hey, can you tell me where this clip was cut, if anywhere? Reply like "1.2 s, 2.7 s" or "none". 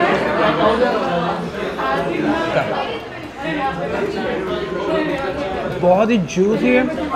2.5 s